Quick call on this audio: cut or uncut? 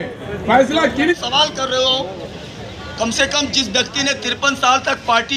cut